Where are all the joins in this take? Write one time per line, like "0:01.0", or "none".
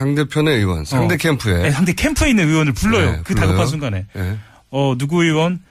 0:02.6